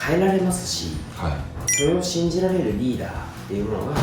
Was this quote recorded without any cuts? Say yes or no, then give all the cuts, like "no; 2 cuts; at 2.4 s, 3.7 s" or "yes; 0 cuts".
yes; 0 cuts